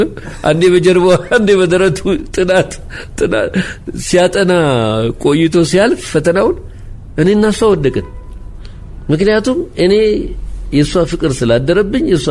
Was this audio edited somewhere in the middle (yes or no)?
no